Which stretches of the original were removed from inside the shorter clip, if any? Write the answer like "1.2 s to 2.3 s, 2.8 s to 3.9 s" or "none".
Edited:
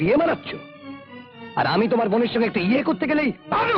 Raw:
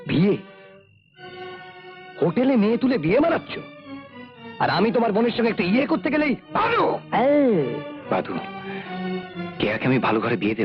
none

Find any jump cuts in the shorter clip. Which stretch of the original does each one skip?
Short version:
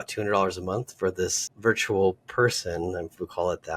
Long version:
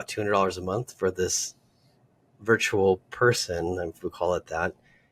1.4 s to 2.3 s

